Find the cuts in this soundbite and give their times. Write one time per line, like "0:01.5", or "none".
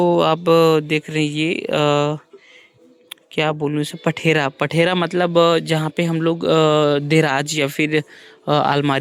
none